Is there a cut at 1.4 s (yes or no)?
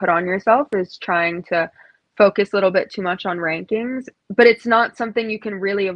no